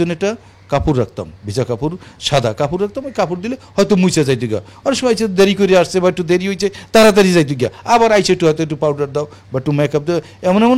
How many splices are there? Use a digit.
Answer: 0